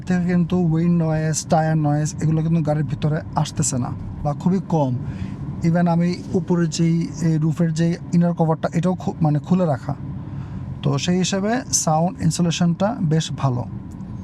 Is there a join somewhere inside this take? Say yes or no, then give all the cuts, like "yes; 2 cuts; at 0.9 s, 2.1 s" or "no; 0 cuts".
no; 0 cuts